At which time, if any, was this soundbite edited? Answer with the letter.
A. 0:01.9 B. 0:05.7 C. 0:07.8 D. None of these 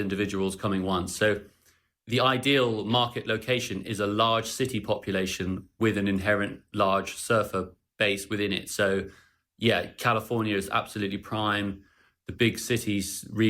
C